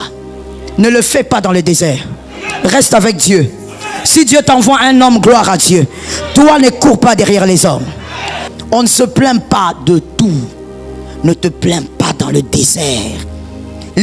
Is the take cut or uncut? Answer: cut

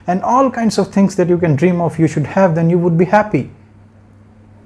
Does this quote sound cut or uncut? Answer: uncut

